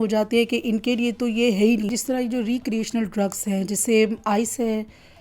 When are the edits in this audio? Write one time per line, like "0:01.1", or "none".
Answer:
0:01.9